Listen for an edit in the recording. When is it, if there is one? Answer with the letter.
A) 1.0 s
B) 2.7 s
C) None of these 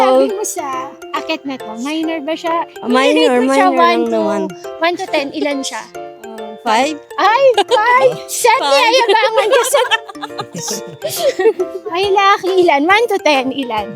A